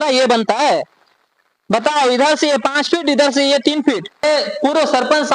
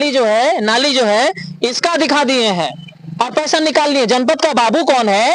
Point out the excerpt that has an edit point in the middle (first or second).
first